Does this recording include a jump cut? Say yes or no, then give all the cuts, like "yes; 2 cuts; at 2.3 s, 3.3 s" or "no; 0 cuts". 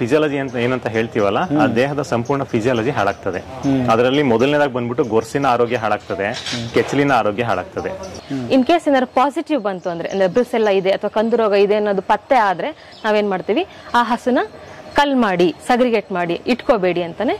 yes; 1 cut; at 8.2 s